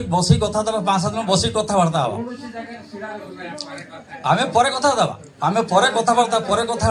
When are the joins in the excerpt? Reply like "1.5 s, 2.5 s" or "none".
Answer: none